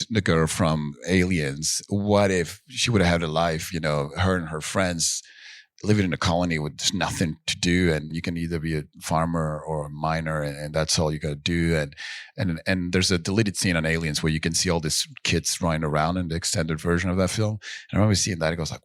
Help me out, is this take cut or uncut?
cut